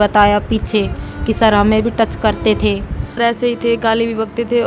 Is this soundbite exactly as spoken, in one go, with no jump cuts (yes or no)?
no